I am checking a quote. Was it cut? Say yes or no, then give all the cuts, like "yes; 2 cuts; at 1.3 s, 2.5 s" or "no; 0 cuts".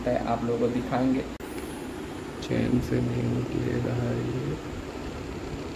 yes; 1 cut; at 1.4 s